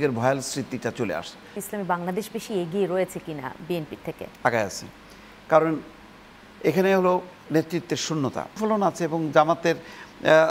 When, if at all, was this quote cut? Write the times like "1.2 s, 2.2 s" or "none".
1.6 s, 8.5 s

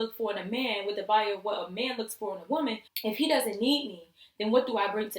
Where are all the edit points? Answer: 2.9 s

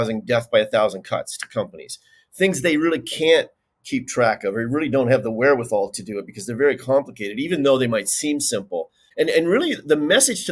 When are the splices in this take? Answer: 9.0 s

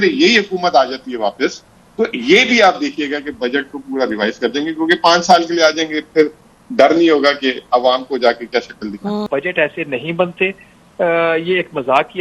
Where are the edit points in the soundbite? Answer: 9.2 s

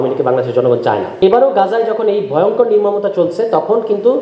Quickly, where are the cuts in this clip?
1.1 s

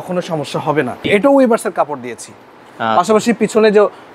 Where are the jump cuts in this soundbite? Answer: 1.0 s

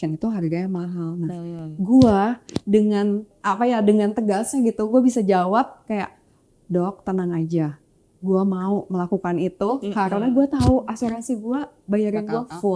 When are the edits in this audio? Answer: none

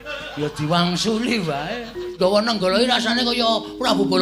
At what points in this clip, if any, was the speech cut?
2.1 s

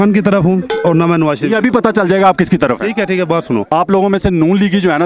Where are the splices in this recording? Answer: 3.6 s

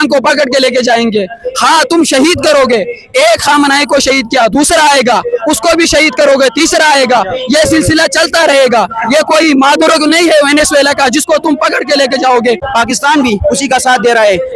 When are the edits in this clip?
12.6 s

